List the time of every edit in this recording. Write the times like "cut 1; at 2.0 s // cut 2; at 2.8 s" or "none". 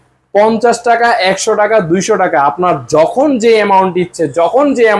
none